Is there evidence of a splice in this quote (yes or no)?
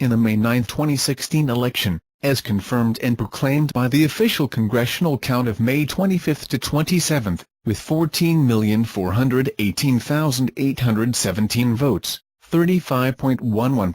yes